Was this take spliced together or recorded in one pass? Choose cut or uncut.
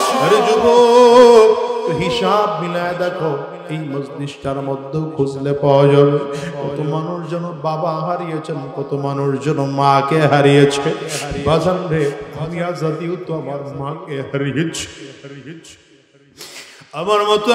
uncut